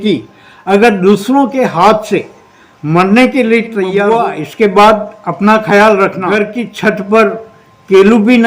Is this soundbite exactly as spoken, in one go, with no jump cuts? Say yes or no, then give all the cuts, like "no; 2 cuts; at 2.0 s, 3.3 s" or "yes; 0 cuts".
no; 2 cuts; at 4.0 s, 6.3 s